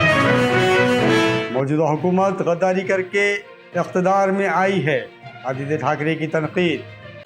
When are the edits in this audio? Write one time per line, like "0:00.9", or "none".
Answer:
0:01.2